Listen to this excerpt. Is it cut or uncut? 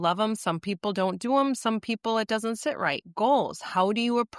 uncut